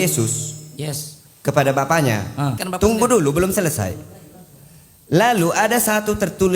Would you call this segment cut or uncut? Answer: cut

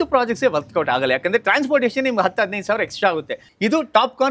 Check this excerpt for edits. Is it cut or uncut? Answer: cut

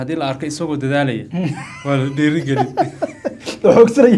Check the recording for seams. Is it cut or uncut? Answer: uncut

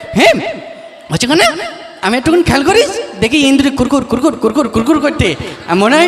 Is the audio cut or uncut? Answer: uncut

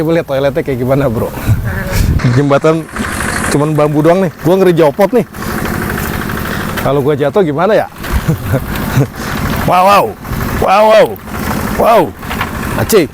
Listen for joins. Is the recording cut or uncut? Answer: cut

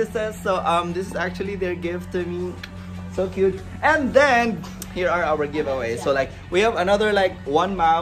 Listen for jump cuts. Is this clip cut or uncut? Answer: uncut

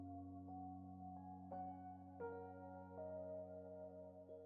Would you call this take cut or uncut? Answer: uncut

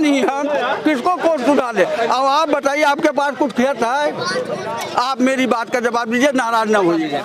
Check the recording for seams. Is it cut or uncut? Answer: uncut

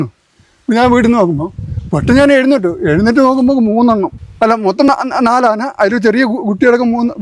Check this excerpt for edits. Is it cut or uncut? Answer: cut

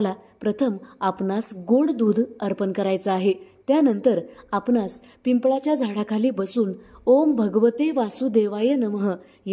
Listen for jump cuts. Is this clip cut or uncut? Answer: uncut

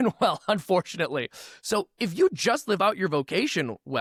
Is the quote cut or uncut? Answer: uncut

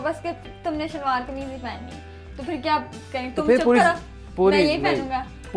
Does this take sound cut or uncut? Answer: uncut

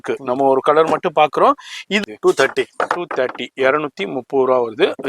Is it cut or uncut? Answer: cut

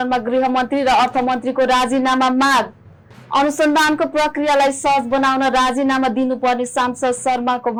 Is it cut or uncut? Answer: uncut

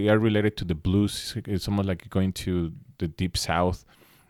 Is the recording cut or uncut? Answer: uncut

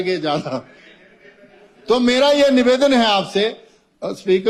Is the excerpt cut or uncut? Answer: uncut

